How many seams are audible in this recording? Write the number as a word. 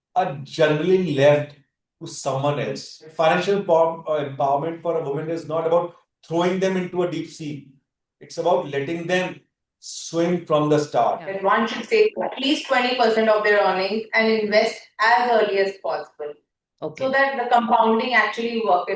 two